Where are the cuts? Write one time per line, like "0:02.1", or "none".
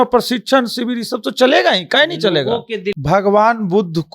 0:03.0